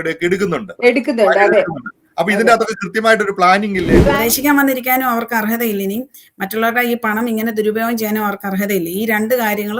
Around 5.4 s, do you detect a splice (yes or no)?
no